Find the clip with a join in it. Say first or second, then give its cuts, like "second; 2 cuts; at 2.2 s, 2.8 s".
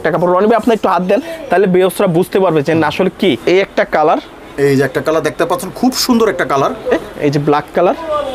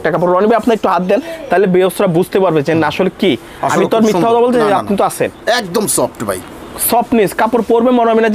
first; 2 cuts; at 3.4 s, 7.0 s